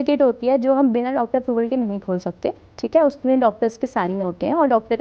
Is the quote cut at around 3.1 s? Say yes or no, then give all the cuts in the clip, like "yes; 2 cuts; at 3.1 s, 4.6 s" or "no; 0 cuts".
no; 0 cuts